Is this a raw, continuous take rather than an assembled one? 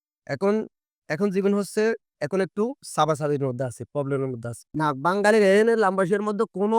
no; 1 cut; at 4.6 s

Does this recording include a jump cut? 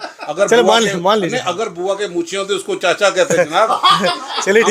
no; 0 cuts

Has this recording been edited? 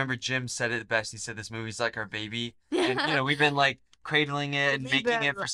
no; 0 cuts

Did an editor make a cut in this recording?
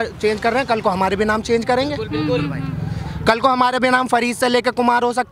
no; 0 cuts

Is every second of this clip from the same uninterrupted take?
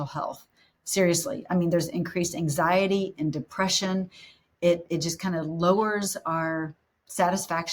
yes; 0 cuts

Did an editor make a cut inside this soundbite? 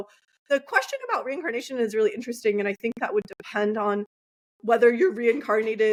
no; 0 cuts

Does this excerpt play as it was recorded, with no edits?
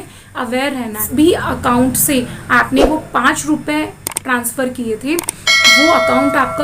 no; 1 cut; at 1.0 s

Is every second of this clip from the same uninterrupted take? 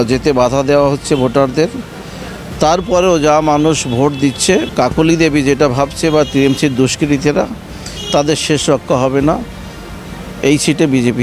no; 1 cut; at 4.7 s

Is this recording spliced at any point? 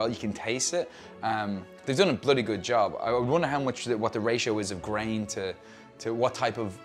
no; 0 cuts

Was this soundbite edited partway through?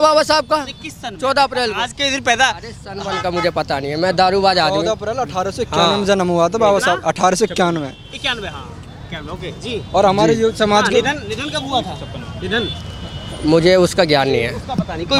no; 0 cuts

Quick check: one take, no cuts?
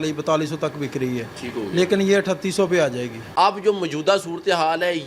no; 1 cut; at 3.2 s

